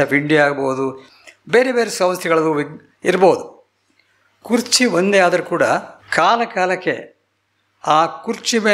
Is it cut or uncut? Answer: cut